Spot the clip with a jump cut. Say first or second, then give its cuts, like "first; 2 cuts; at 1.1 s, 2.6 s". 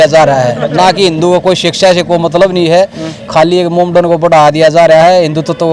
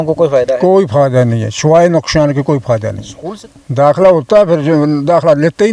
second; 1 cut; at 3.1 s